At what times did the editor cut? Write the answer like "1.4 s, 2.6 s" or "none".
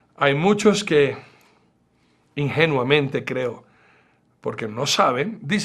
2.9 s